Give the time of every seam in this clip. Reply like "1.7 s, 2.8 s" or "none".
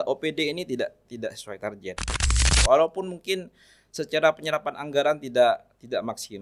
2.2 s